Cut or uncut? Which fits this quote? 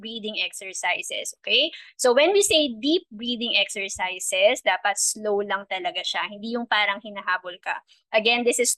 uncut